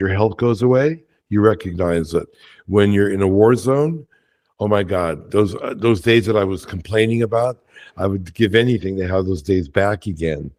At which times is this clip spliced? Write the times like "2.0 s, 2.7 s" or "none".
none

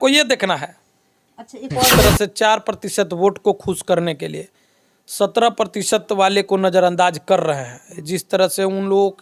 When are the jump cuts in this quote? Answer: 1.9 s

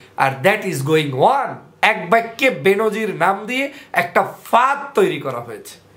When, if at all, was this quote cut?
1.6 s

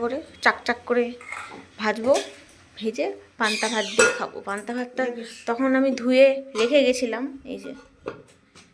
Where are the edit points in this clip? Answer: none

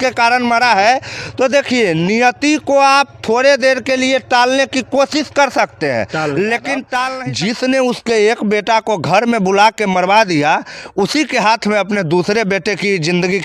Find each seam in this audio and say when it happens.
7.2 s

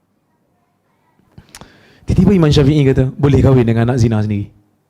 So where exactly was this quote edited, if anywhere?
1.3 s

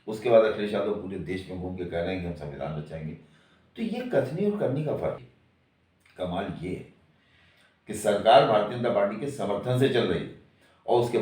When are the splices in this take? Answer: 5.3 s

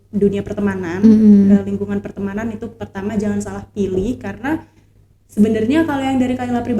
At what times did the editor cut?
none

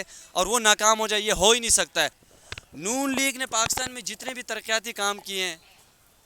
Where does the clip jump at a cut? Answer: 2.2 s

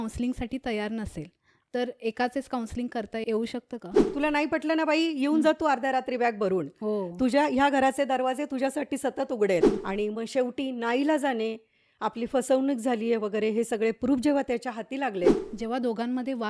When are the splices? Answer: 4.1 s, 9.8 s, 15.4 s

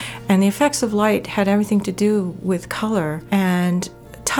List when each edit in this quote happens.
3.2 s

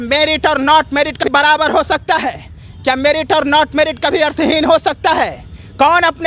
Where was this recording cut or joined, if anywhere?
1.3 s

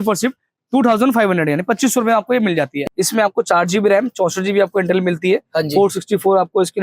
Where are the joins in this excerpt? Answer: 2.8 s

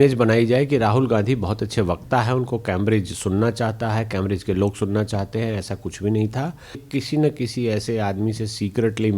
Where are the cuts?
6.9 s

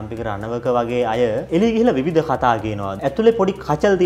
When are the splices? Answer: 1.4 s, 2.9 s

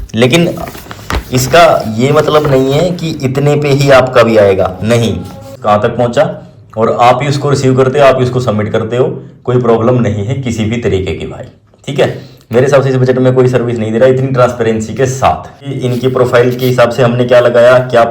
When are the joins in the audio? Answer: 5.5 s, 15.6 s

